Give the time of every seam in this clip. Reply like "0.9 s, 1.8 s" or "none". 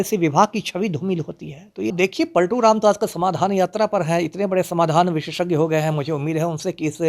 1.9 s